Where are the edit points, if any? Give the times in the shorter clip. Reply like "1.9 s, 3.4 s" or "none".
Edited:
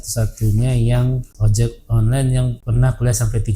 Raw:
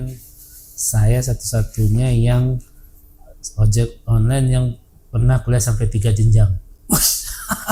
1.3 s, 2.6 s